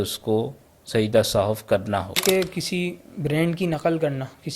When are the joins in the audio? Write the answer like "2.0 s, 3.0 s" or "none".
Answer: 2.2 s